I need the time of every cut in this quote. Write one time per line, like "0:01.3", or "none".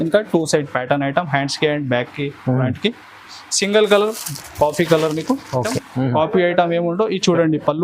0:05.8